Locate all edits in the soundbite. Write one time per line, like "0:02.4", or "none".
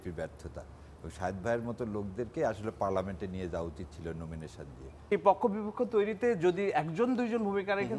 0:05.1